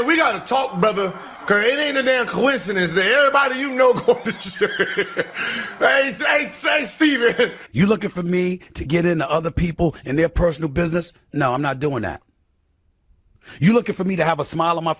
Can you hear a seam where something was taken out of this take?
yes; 2 cuts; at 1.3 s, 7.6 s

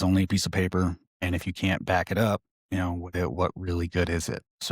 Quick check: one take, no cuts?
no; 2 cuts; at 1.1 s, 2.5 s

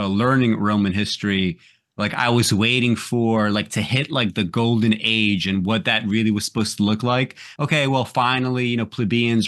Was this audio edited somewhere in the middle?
no; 0 cuts

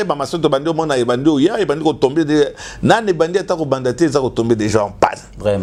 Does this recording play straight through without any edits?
yes; 0 cuts

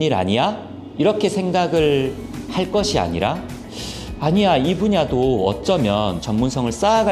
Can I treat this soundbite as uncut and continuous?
yes; 0 cuts

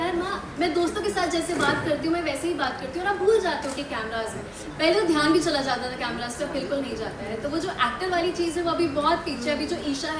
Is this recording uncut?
yes; 0 cuts

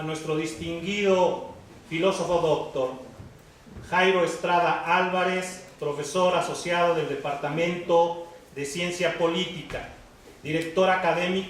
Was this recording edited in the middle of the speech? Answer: yes; 1 cut; at 8.0 s

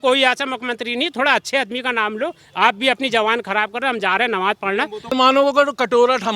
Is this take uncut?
no; 1 cut; at 5.2 s

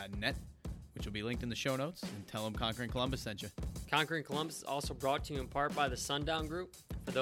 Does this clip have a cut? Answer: yes; 1 cut; at 3.8 s

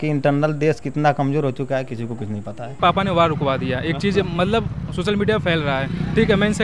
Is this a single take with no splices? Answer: no; 1 cut; at 2.7 s

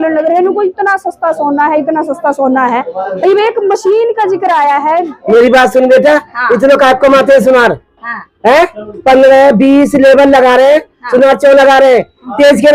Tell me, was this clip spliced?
yes; 1 cut; at 5.1 s

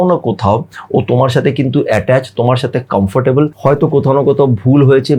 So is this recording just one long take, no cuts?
no; 1 cut; at 3.5 s

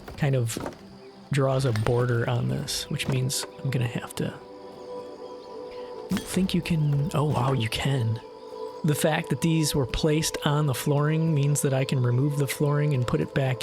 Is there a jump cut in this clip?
yes; 1 cut; at 8.8 s

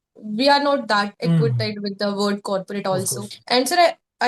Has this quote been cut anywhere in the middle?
yes; 1 cut; at 3.3 s

